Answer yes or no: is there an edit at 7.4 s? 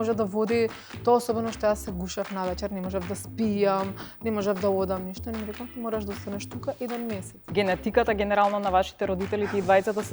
yes